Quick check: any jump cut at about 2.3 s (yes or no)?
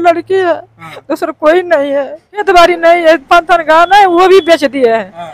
yes